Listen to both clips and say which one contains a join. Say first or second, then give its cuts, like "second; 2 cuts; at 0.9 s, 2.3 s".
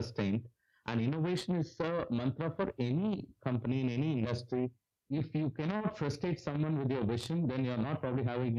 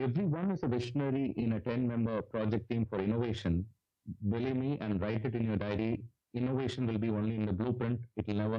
first; 1 cut; at 4.9 s